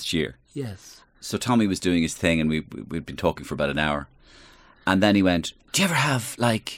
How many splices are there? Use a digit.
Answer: 1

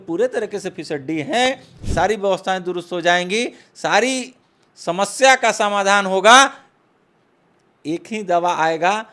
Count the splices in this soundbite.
1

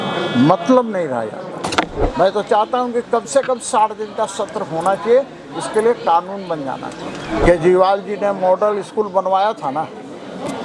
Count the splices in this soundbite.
2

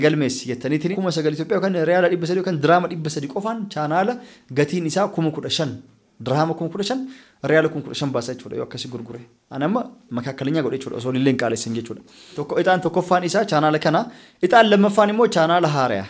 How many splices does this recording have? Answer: 2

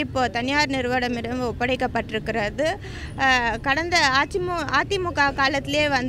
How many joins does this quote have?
0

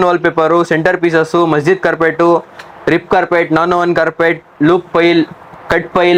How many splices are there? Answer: 0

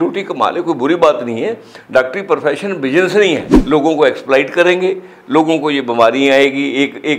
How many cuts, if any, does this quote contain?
1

